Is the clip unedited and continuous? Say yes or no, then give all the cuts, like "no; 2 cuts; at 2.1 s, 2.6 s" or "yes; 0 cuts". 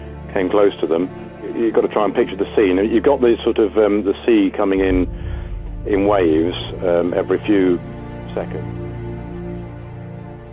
yes; 0 cuts